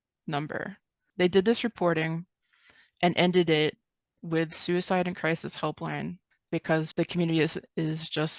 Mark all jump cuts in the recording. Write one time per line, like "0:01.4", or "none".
0:01.0
0:06.3
0:06.9